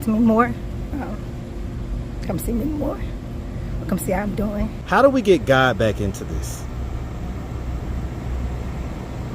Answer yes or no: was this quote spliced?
yes